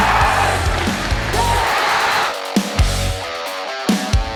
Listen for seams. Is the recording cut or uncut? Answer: uncut